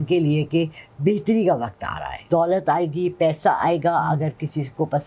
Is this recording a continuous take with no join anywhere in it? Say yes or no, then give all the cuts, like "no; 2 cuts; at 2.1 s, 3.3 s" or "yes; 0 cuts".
no; 1 cut; at 2.2 s